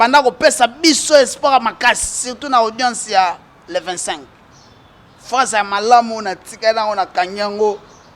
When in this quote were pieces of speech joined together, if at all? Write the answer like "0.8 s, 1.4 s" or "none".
none